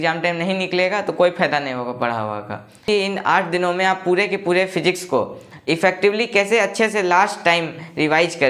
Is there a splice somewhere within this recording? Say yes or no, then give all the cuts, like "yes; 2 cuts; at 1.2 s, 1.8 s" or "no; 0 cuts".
yes; 1 cut; at 2.8 s